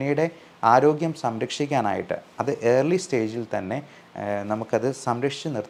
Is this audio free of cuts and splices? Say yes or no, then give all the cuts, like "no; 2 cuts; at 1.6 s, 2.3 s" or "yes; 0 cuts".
yes; 0 cuts